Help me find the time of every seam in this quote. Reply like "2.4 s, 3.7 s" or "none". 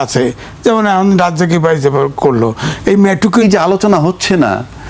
3.4 s